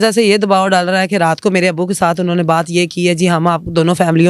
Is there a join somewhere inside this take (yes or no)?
no